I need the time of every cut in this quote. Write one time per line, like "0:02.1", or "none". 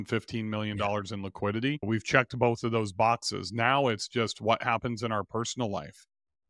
0:01.8